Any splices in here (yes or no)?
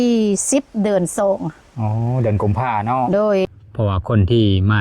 yes